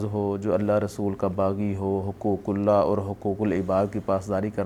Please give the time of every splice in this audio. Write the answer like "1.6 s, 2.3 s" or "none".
none

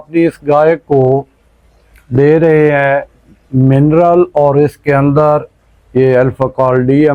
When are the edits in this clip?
none

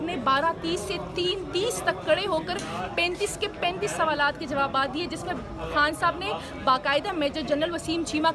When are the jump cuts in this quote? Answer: none

